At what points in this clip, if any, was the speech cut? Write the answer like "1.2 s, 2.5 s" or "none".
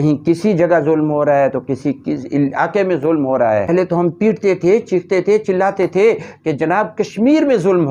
3.7 s